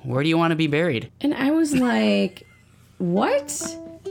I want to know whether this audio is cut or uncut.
cut